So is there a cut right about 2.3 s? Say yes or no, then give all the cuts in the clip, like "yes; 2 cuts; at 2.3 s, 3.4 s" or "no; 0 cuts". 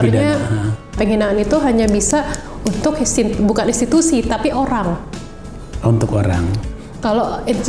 no; 2 cuts; at 1.0 s, 6.5 s